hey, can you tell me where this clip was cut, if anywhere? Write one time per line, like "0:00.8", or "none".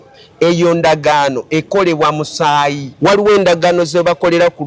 0:02.8

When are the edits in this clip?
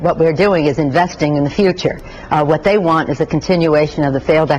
0:02.4

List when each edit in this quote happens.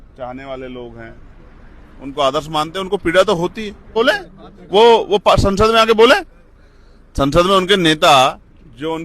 0:03.9

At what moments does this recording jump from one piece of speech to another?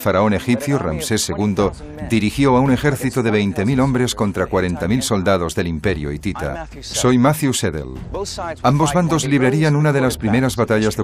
0:09.1

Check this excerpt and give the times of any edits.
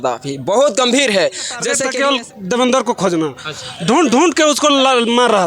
0:01.5

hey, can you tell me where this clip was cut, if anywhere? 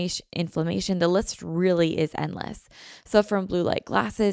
none

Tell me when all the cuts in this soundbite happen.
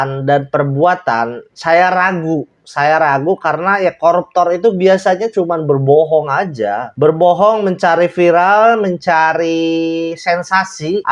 none

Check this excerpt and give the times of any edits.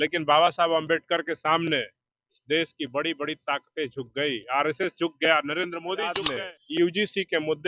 0:06.2

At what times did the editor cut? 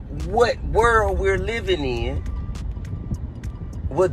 none

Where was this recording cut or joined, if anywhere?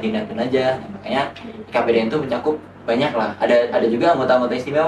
none

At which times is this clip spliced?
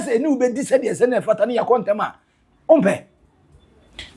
none

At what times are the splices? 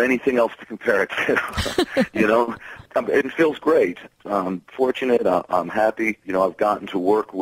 0:02.8
0:04.1
0:06.2

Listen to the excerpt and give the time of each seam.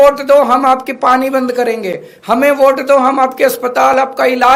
none

